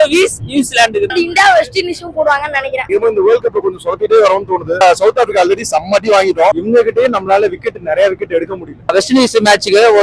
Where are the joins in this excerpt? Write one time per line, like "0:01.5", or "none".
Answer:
0:01.1
0:02.8
0:06.5
0:08.9